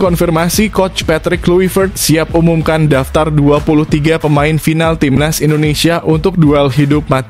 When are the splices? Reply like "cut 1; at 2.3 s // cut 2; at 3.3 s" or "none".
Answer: none